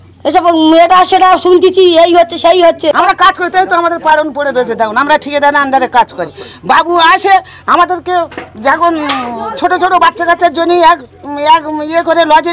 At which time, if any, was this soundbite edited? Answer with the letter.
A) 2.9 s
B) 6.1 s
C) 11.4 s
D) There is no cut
A